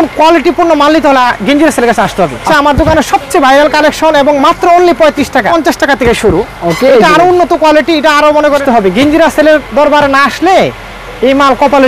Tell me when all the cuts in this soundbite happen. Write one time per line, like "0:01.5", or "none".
0:02.4
0:05.5
0:08.6

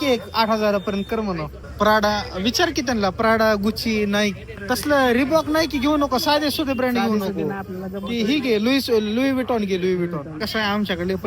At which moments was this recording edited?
0:01.6
0:10.4

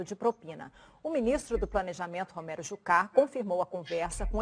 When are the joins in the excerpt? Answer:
0:01.5

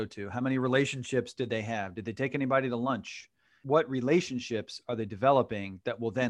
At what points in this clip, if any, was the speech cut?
0:03.6

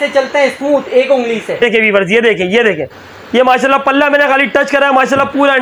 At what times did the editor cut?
0:01.6

